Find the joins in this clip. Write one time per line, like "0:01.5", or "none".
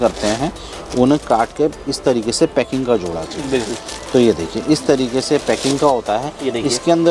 none